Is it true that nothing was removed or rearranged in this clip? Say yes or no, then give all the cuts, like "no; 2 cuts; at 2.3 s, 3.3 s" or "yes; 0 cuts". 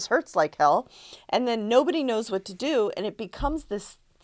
yes; 0 cuts